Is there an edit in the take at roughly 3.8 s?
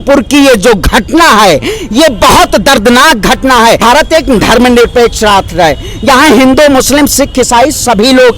yes; 1 cut; at 3.8 s

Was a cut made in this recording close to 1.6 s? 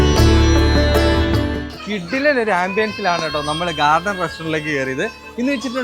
yes; 1 cut; at 1.6 s

